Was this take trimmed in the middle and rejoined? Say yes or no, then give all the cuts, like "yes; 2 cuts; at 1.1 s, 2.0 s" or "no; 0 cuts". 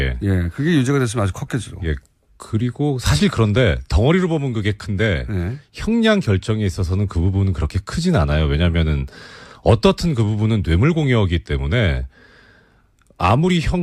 no; 0 cuts